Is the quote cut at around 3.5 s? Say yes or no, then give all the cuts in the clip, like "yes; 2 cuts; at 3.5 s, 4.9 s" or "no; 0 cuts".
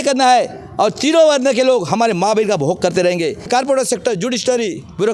yes; 1 cut; at 3.5 s